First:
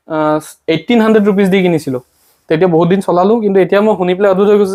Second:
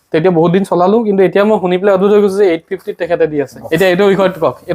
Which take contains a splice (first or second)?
second